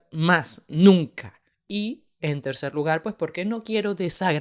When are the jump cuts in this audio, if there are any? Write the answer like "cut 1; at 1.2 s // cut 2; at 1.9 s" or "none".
cut 1; at 1.3 s